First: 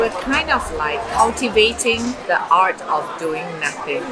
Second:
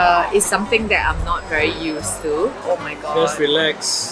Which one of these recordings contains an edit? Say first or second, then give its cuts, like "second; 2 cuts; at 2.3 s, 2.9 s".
second; 1 cut; at 2.5 s